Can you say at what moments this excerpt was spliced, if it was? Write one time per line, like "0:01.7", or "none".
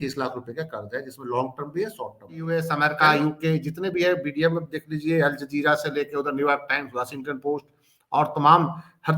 0:02.4